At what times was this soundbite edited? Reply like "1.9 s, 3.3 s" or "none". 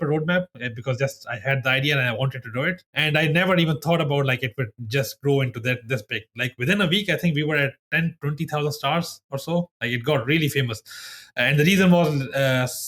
2.9 s